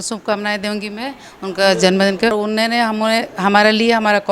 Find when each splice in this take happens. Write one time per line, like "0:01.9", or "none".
0:02.4